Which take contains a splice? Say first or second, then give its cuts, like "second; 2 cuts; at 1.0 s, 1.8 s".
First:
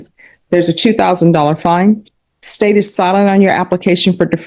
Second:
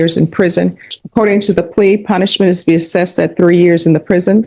second; 1 cut; at 0.9 s